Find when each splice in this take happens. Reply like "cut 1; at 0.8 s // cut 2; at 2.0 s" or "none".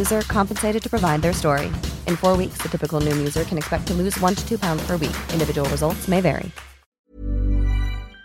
cut 1; at 6.9 s